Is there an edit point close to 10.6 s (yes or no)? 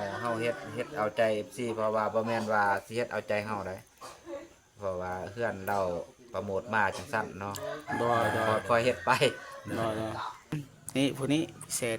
yes